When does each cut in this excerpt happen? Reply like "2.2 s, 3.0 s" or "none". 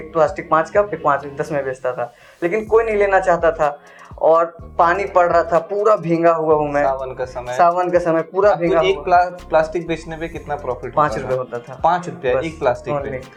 none